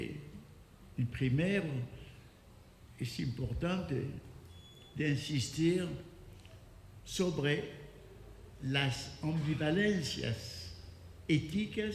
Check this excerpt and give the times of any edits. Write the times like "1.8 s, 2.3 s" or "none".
1.7 s